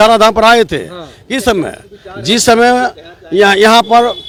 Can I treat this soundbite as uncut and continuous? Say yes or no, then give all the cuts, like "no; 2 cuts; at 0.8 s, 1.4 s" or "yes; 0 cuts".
yes; 0 cuts